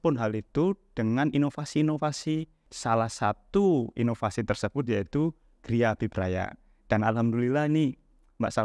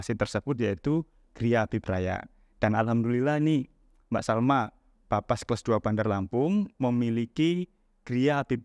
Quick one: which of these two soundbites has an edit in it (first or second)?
first